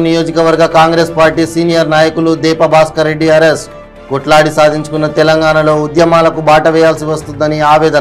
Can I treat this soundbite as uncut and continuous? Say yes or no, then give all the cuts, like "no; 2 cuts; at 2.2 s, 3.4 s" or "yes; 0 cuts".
yes; 0 cuts